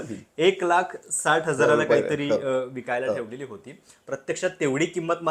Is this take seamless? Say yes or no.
yes